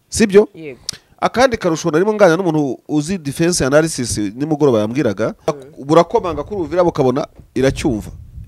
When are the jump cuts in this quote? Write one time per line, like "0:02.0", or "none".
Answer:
0:05.5